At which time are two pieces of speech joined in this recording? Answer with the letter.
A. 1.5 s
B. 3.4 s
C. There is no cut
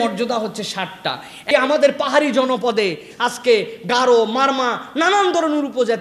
A